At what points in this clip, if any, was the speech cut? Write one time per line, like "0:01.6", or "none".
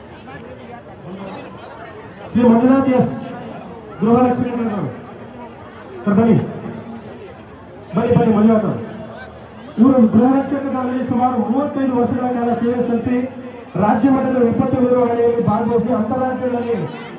none